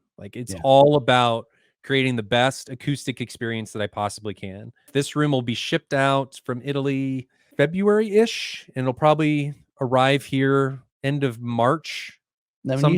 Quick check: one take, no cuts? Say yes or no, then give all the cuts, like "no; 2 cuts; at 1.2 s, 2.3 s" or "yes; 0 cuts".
no; 2 cuts; at 4.9 s, 7.4 s